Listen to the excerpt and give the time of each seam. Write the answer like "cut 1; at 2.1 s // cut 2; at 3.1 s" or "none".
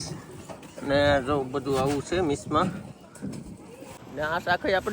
cut 1; at 4.0 s